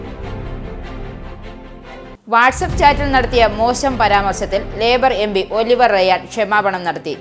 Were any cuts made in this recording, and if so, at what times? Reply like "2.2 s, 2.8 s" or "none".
2.2 s